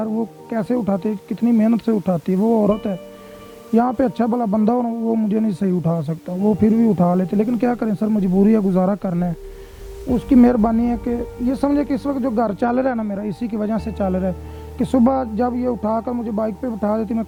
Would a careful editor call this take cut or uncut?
uncut